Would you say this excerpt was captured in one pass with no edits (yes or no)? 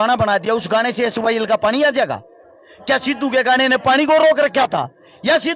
yes